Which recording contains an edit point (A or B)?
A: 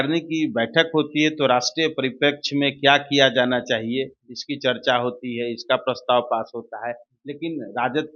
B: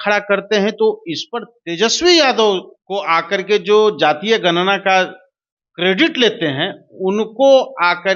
B